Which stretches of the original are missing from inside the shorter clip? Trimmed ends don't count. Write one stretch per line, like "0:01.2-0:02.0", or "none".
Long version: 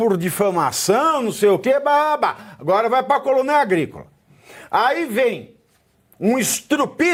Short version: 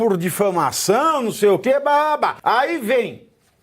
0:02.4-0:04.6